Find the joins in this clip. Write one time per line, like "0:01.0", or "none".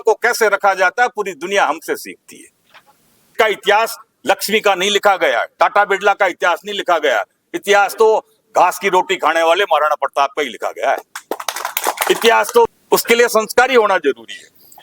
0:03.3
0:12.7